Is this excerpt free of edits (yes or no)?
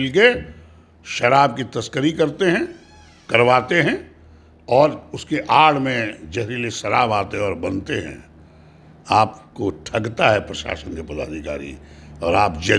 yes